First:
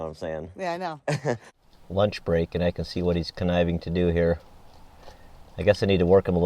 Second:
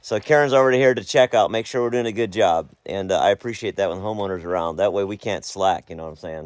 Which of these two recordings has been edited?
first; 1 cut; at 1.5 s

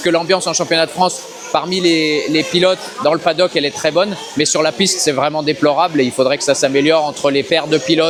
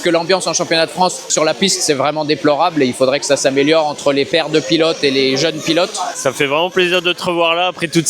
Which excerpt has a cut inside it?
second; 2 cuts; at 1.3 s, 6.1 s

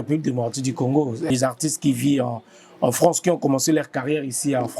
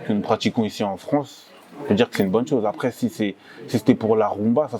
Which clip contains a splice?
first; 1 cut; at 1.3 s

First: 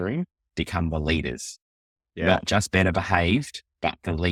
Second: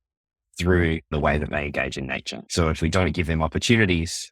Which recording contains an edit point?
second; 2 cuts; at 1.1 s, 2.4 s

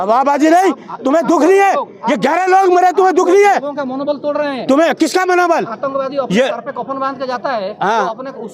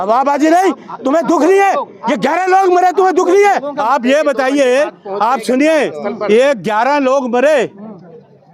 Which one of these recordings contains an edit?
second; 1 cut; at 3.7 s

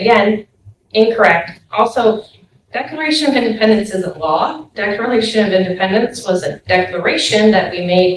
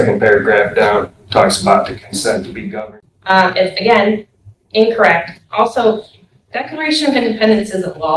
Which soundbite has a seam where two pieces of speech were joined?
second; 1 cut; at 2.7 s

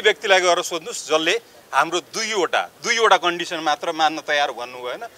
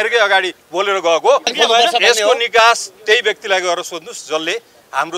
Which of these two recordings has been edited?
second; 1 cut; at 1.5 s

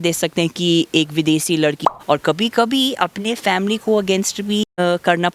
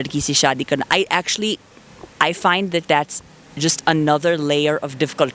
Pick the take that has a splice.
first; 2 cuts; at 1.8 s, 4.6 s

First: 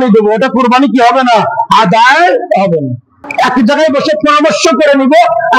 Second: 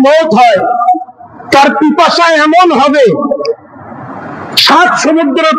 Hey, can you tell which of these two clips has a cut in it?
first; 1 cut; at 3.2 s

